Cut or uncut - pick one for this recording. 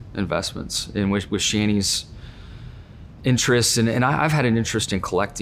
uncut